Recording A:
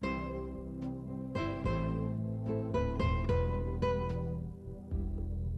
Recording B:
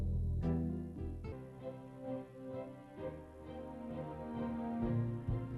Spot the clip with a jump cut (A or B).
B